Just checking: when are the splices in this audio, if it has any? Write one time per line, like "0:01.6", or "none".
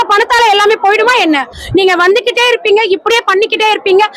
0:01.6